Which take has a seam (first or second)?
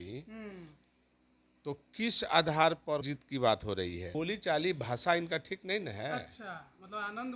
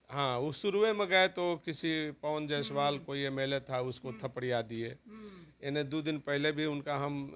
first